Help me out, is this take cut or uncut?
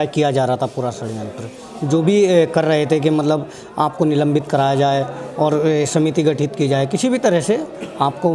uncut